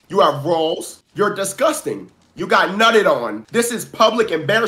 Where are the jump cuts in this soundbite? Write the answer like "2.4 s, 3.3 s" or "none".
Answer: 1.0 s, 3.4 s

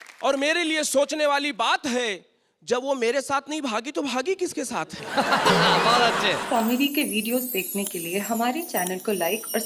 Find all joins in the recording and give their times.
6.4 s

